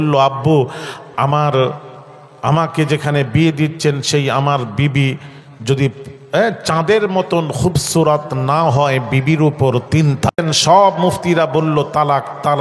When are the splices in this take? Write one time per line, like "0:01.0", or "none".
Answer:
0:10.3